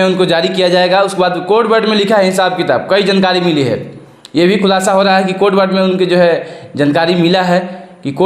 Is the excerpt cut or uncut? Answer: uncut